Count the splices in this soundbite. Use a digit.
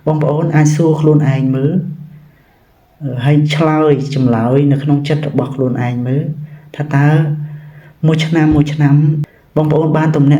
1